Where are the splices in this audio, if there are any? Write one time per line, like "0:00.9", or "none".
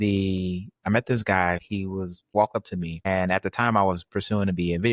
0:02.0